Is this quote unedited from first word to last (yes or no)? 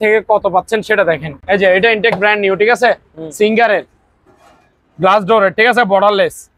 yes